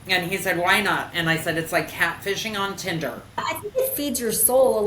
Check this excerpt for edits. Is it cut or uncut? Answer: cut